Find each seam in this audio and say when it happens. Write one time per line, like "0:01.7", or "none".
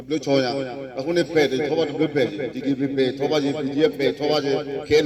none